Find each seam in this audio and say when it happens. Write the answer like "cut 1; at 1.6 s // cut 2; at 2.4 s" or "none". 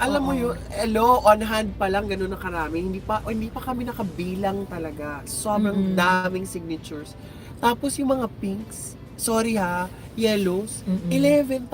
none